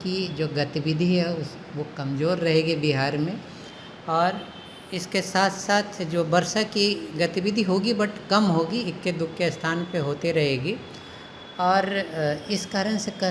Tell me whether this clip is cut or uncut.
uncut